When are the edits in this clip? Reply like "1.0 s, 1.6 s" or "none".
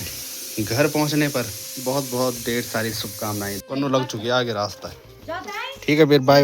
1.7 s, 3.7 s